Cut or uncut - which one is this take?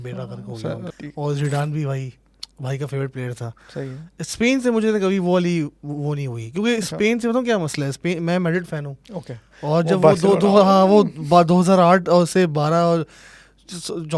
cut